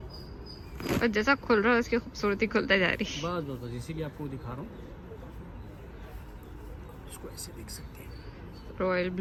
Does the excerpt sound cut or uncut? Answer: uncut